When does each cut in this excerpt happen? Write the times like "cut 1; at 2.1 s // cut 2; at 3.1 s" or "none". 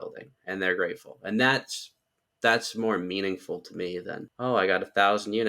cut 1; at 4.3 s